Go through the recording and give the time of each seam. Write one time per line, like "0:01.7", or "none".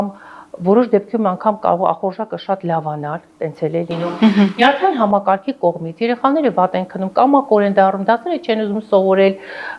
none